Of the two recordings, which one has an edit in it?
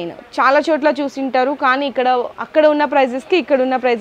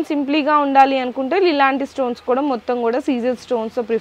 first; 1 cut; at 2.4 s

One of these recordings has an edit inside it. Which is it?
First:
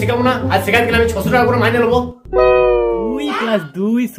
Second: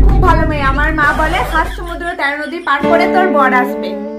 first; 1 cut; at 3.2 s

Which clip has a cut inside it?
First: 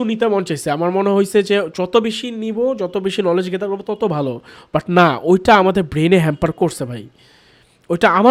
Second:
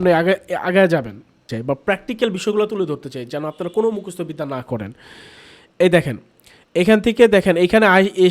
second; 1 cut; at 1.5 s

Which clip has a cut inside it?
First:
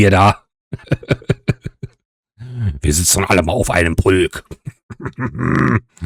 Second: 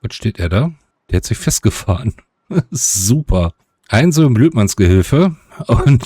second; 1 cut; at 0.9 s

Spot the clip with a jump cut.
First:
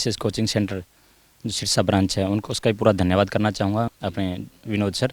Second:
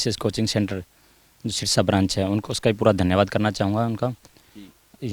first; 1 cut; at 3.9 s

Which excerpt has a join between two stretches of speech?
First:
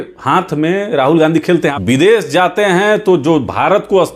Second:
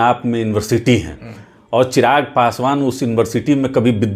first; 1 cut; at 1.8 s

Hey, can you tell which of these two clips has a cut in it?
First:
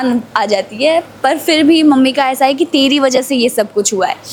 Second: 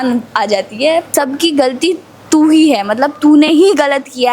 second; 1 cut; at 1.1 s

